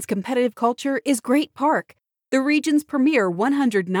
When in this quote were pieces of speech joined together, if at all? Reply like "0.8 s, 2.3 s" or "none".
none